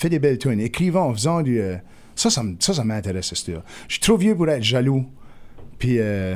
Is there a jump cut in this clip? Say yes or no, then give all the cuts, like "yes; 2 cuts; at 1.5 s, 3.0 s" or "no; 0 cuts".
no; 0 cuts